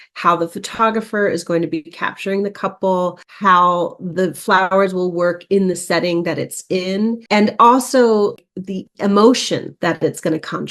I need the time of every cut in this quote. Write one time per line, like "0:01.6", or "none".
none